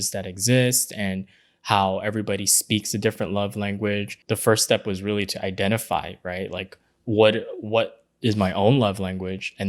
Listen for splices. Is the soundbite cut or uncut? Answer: cut